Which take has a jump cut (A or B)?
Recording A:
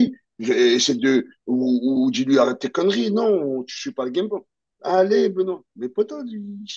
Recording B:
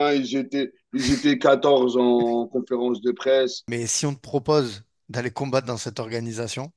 B